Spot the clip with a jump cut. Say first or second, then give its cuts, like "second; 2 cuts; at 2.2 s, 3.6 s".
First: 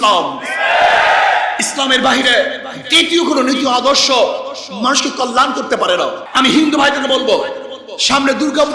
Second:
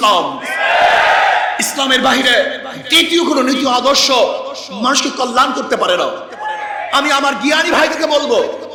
first; 1 cut; at 6.2 s